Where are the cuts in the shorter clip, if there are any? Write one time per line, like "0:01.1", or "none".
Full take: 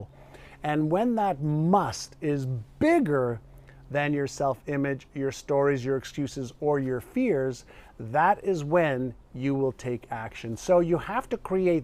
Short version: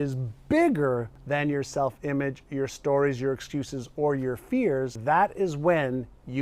0:01.1
0:04.9